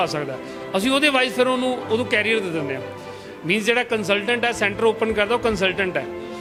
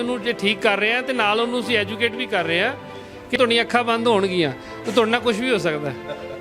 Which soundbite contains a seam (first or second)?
second